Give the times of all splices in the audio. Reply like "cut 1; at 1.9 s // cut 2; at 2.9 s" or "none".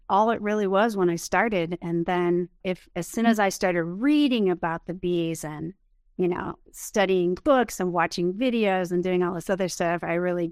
cut 1; at 2.6 s

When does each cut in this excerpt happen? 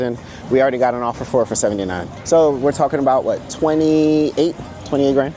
cut 1; at 2.1 s

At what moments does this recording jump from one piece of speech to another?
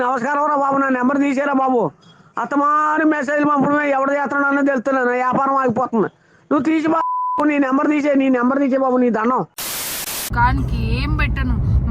cut 1; at 10.3 s

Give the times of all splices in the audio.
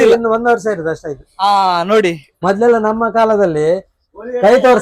cut 1; at 2.3 s

